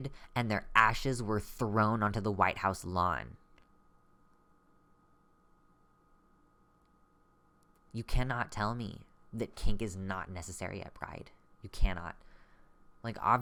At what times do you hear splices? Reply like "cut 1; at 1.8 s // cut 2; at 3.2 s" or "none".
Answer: none